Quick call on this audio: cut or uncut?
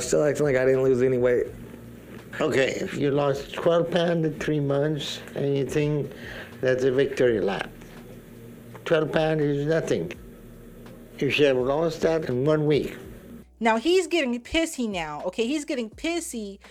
uncut